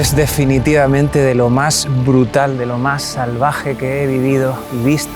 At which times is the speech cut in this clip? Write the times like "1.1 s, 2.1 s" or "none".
none

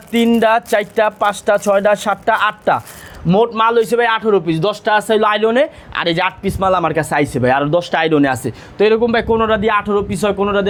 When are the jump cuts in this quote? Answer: none

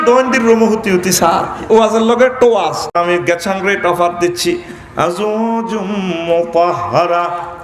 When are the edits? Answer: 2.9 s

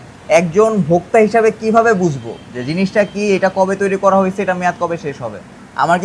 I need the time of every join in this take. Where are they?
none

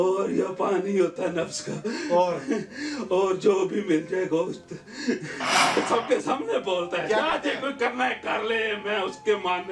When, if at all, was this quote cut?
5.8 s

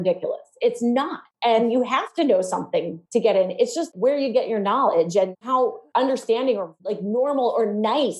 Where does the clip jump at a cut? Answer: 1.2 s, 3.0 s, 3.9 s, 5.4 s, 6.8 s

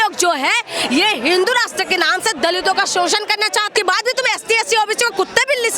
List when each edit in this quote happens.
3.7 s

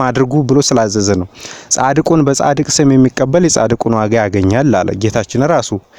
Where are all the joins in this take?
none

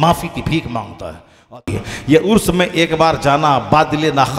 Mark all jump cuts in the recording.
1.5 s

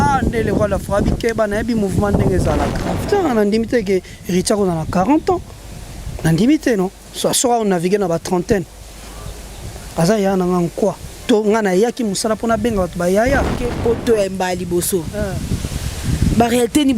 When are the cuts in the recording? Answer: 2.9 s, 13.8 s

